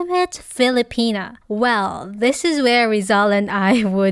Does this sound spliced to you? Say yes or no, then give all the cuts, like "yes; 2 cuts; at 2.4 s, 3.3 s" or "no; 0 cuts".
yes; 1 cut; at 1.4 s